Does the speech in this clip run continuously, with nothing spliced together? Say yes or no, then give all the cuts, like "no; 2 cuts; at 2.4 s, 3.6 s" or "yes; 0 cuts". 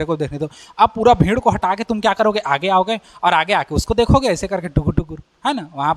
yes; 0 cuts